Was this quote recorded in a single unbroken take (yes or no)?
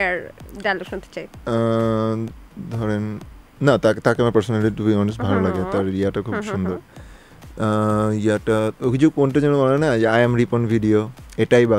yes